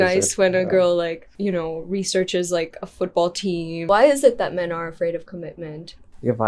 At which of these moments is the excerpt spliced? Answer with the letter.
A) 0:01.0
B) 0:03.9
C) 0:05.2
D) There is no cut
B